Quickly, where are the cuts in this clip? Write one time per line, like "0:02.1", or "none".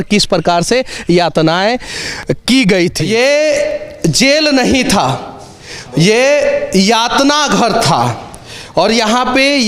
0:03.0